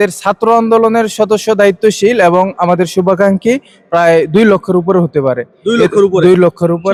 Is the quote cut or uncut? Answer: uncut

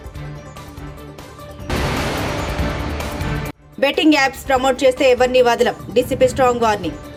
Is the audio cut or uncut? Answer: uncut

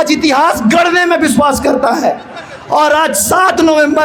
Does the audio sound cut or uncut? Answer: uncut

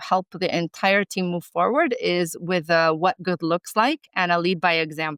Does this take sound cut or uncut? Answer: uncut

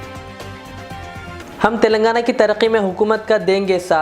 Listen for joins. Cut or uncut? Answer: cut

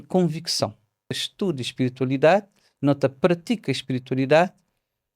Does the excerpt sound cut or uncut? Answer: cut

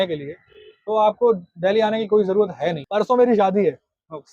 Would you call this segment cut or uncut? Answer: cut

